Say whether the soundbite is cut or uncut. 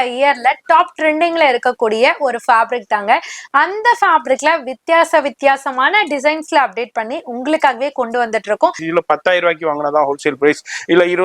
cut